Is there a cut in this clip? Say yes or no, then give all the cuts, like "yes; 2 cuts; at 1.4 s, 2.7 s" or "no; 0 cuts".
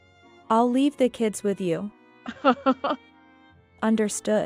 yes; 1 cut; at 3.1 s